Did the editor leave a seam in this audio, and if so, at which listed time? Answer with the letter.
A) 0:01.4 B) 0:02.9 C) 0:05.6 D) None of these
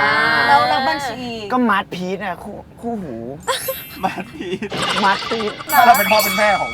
C